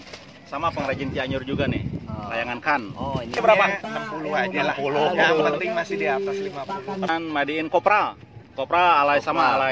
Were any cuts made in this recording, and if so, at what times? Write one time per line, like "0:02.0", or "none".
0:03.4
0:07.1